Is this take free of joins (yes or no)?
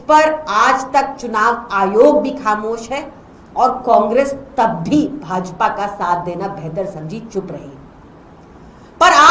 yes